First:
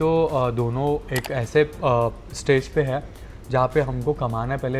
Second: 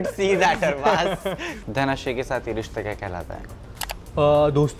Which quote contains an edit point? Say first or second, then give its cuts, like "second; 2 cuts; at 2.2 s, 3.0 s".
second; 1 cut; at 1.5 s